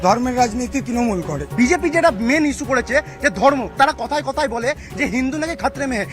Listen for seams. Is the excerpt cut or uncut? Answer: cut